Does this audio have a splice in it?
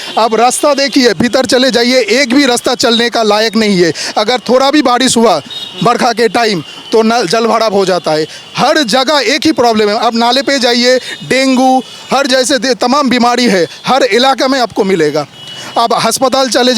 no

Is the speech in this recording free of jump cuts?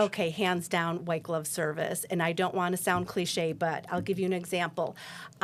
yes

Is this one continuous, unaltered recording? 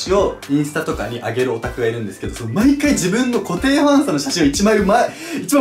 yes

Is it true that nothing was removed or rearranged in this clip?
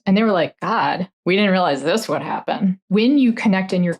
no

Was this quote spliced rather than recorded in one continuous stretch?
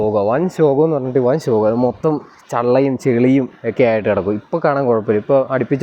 no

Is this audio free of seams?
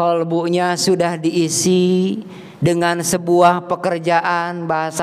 yes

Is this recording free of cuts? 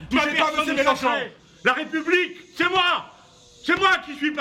yes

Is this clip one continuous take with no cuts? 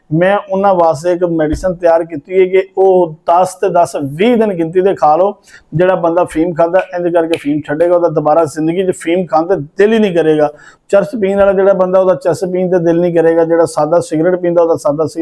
yes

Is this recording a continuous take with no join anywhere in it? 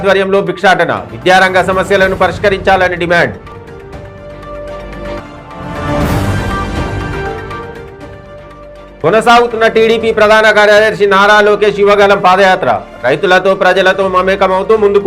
yes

